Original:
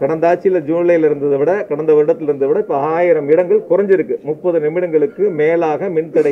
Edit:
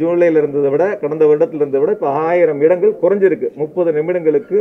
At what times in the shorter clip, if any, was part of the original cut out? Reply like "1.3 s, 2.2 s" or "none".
none